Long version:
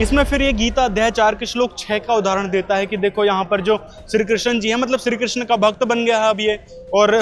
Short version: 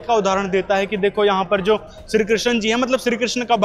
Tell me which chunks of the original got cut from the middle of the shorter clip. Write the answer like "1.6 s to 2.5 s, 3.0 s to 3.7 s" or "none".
none